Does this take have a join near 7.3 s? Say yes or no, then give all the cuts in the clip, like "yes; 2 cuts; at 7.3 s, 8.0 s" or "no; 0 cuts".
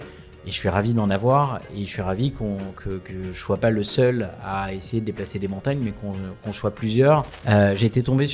yes; 1 cut; at 7.3 s